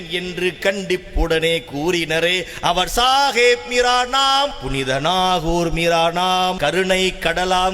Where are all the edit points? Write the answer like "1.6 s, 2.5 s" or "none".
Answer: 4.6 s, 6.6 s